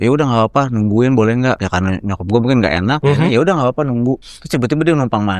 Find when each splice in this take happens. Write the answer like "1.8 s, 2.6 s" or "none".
1.6 s, 3.0 s, 4.3 s